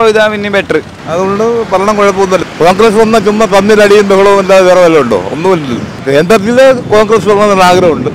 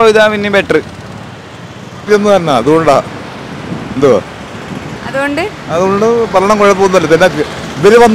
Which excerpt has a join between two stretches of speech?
first; 3 cuts; at 1.0 s, 2.4 s, 6.0 s

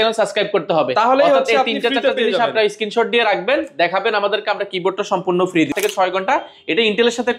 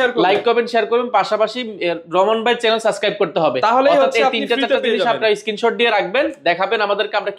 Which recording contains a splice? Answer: first; 1 cut; at 5.7 s

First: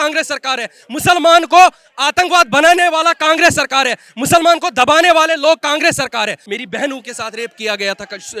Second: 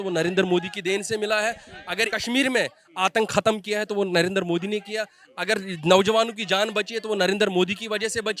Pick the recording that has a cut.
first; 1 cut; at 6.4 s

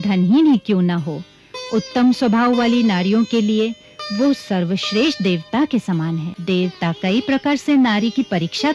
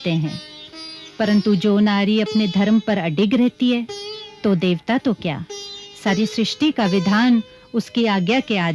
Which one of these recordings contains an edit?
first; 1 cut; at 6.3 s

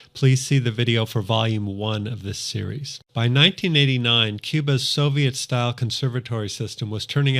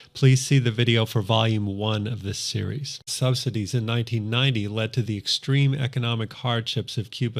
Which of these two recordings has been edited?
first; 1 cut; at 3.1 s

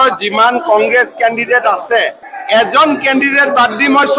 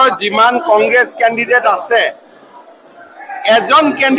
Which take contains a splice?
first; 1 cut; at 2.3 s

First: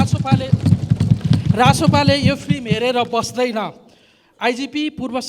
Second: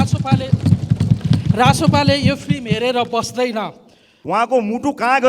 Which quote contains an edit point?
second; 1 cut; at 4.2 s

